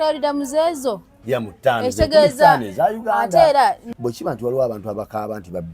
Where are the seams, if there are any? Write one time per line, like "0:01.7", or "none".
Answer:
0:04.0

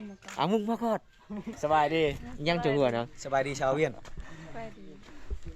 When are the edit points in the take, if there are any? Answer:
0:01.6

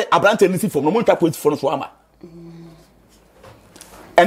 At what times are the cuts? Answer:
none

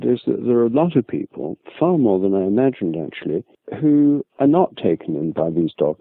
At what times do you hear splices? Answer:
none

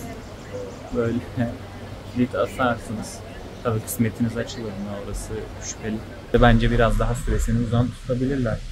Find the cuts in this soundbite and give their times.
0:06.3

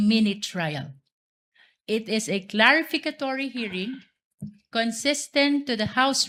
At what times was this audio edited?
none

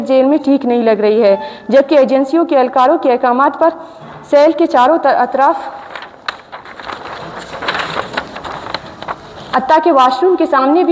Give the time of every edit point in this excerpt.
none

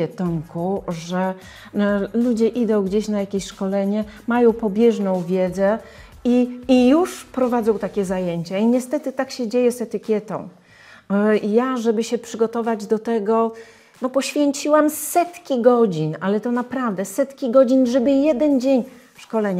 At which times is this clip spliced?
none

